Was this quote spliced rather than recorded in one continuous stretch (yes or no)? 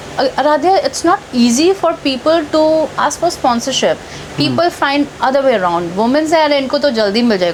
no